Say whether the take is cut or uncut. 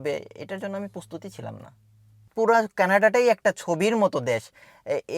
cut